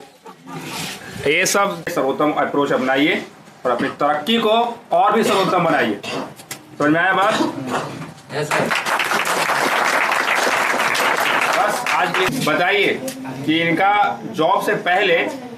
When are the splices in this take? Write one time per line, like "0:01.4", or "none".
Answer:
0:01.9
0:12.3